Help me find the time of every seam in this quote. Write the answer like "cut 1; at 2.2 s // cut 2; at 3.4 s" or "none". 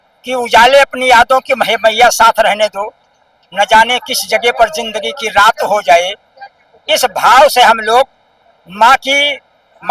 none